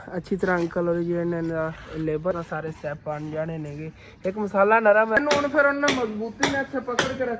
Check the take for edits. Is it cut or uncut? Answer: cut